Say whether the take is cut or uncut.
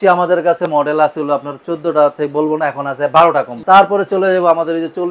cut